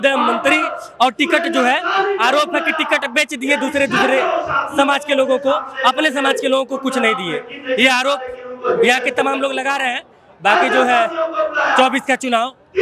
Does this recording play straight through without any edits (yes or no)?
yes